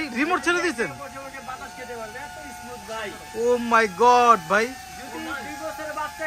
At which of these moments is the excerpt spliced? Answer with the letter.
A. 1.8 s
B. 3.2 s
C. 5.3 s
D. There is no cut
D